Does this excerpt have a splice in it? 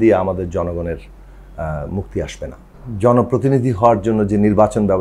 yes; 1 cut; at 2.6 s

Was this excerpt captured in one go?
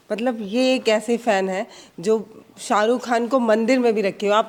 yes; 0 cuts

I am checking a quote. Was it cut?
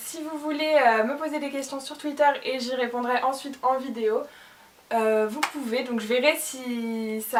no; 0 cuts

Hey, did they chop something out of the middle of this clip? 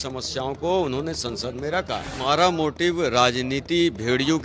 yes; 1 cut; at 2.1 s

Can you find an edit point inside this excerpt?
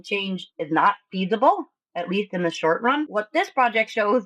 yes; 1 cut; at 3.1 s

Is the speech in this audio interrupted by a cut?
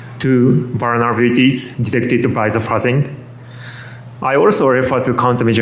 no; 0 cuts

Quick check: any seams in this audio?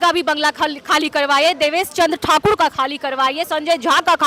no; 0 cuts

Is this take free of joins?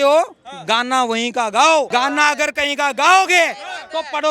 no; 1 cut; at 1.9 s

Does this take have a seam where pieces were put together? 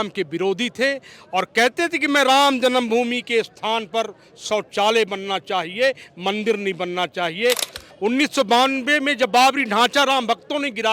yes; 1 cut; at 7.8 s

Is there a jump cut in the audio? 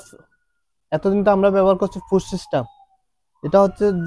no; 0 cuts

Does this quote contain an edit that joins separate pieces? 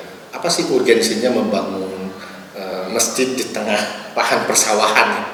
no; 0 cuts

